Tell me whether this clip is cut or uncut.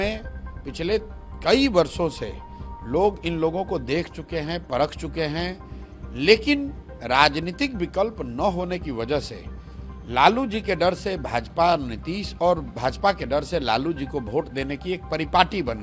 uncut